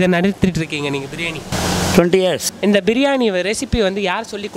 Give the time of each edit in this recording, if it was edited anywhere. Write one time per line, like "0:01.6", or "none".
0:01.5
0:02.5